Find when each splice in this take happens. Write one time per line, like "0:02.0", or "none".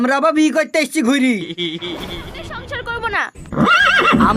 0:02.6